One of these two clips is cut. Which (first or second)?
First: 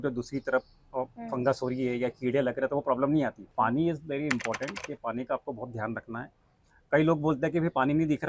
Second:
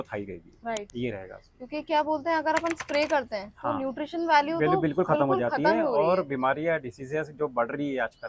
first